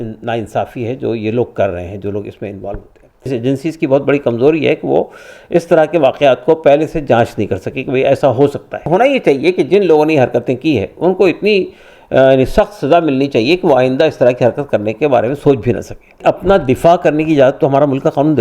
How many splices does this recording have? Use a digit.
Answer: 3